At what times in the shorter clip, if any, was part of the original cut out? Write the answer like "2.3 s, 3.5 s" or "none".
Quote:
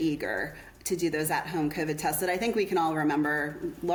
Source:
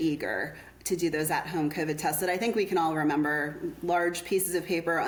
none